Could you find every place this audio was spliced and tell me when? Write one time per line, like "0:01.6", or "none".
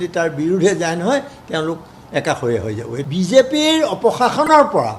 0:03.1